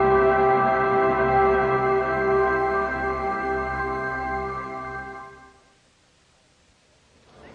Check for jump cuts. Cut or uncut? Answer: uncut